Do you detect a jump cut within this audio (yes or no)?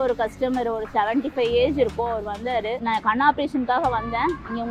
yes